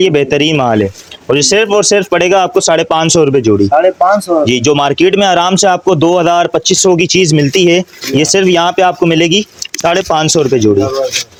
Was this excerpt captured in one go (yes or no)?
yes